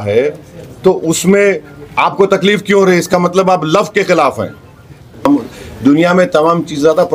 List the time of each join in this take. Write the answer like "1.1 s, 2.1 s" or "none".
5.2 s